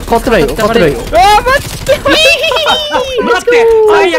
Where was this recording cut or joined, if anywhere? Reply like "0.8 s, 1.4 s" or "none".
none